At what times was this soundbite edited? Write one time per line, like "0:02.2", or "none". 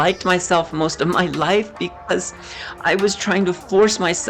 none